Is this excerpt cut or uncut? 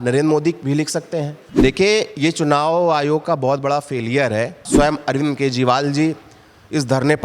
cut